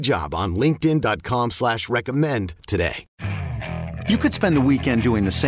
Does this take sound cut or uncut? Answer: cut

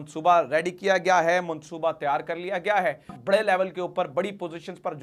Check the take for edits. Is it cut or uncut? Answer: cut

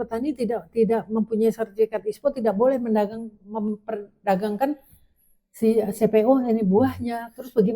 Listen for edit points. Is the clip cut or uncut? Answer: uncut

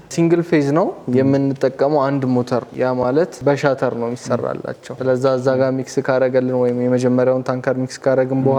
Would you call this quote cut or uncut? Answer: uncut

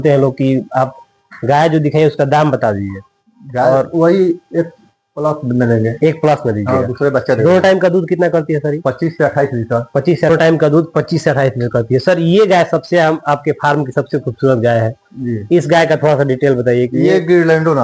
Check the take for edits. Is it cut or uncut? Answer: cut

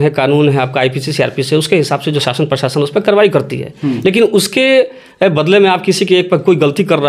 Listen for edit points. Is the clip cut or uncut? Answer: uncut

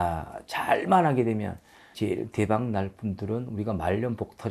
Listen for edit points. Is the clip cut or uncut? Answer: cut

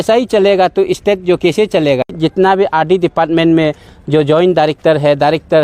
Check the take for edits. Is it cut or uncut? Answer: cut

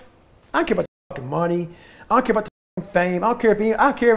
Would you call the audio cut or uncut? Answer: uncut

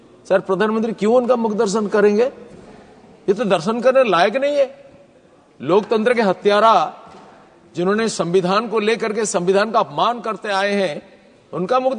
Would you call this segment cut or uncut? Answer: uncut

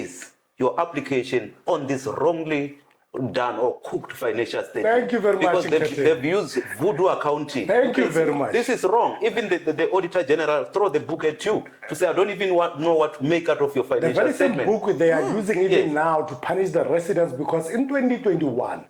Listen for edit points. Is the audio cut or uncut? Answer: uncut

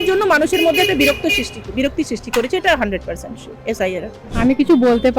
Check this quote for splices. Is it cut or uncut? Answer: cut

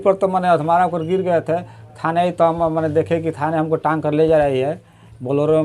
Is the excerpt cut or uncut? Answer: uncut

